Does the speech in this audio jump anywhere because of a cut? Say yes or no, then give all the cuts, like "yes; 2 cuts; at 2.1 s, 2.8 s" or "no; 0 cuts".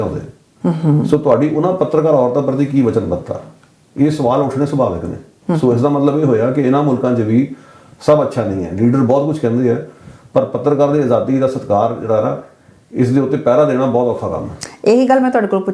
no; 0 cuts